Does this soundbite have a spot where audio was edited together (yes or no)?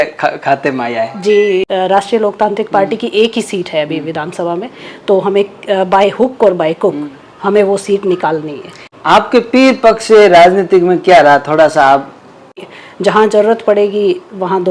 yes